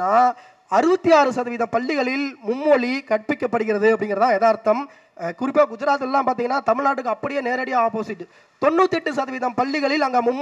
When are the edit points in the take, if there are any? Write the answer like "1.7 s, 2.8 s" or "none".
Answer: none